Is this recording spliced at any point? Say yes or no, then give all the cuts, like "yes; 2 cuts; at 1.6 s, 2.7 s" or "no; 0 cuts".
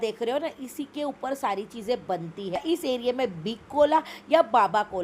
yes; 1 cut; at 2.6 s